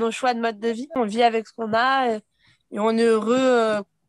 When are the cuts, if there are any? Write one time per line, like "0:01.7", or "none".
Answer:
0:01.0